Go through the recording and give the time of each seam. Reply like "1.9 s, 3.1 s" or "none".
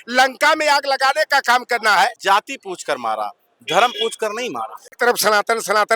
1.9 s, 5.0 s